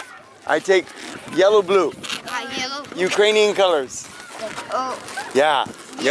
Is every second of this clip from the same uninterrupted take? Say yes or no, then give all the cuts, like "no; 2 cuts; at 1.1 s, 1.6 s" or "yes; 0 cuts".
no; 1 cut; at 4.4 s